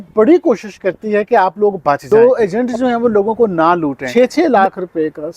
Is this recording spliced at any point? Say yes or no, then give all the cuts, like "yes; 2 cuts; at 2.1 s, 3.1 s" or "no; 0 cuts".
yes; 2 cuts; at 2.0 s, 4.0 s